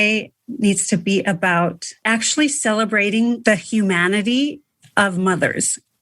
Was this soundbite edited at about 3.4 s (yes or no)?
yes